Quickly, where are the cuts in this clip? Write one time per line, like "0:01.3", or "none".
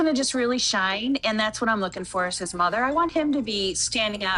none